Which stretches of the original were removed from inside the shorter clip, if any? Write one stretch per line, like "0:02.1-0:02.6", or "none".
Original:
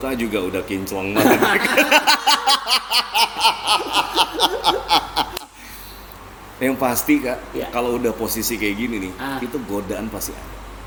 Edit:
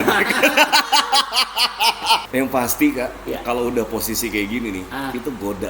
0:03.6-0:06.5